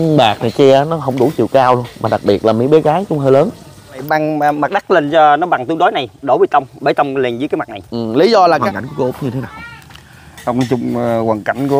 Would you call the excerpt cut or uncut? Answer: cut